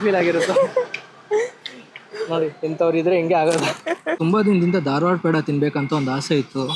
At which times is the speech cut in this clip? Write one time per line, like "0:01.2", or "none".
0:04.1